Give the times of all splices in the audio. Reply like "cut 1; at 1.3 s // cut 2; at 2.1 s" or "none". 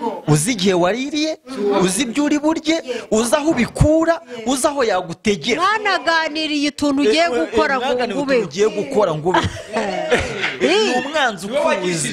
none

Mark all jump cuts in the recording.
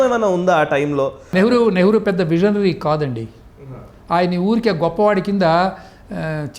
cut 1; at 1.3 s

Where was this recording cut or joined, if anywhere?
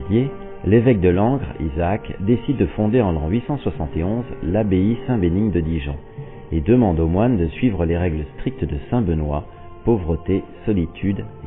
cut 1; at 9.8 s

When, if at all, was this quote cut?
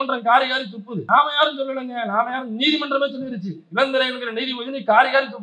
cut 1; at 1.0 s

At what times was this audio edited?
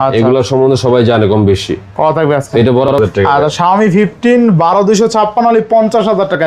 cut 1; at 2.9 s

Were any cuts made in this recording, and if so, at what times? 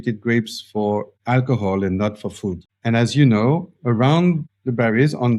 cut 1; at 2.6 s

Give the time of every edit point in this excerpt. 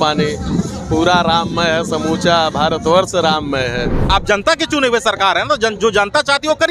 cut 1; at 4.1 s

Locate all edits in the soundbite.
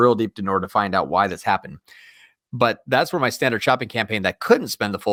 none

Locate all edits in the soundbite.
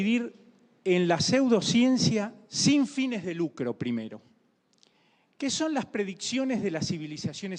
none

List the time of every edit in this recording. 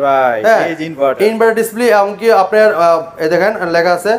none

